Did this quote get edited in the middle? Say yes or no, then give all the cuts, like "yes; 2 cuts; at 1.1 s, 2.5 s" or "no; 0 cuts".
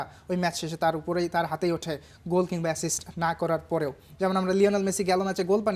no; 0 cuts